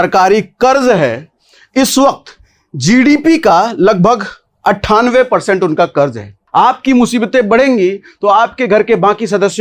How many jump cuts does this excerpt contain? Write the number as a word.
one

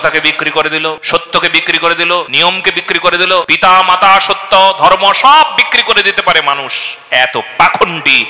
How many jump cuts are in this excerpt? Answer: three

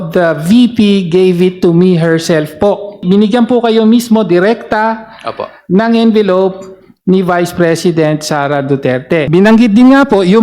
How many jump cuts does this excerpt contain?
two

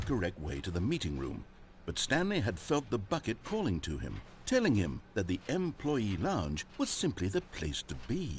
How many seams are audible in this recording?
zero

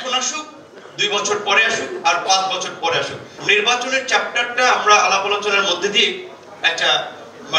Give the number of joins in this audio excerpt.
one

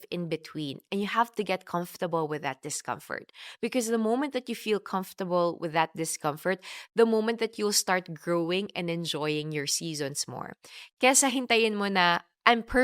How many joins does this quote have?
zero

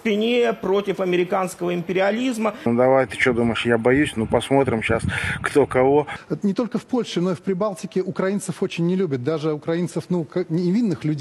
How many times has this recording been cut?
two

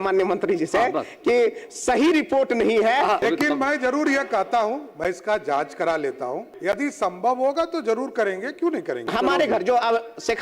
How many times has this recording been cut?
three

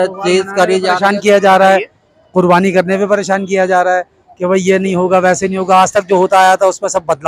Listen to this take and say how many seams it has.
zero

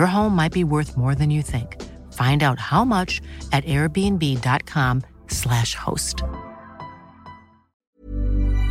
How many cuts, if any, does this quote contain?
one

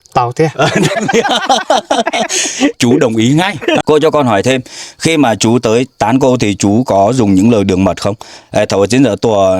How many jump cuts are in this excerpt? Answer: one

